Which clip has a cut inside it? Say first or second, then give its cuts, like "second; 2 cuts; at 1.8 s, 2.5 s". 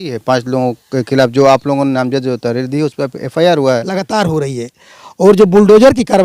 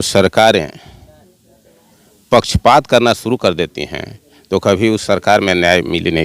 first; 1 cut; at 4.0 s